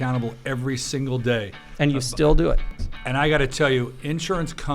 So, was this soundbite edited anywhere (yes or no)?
yes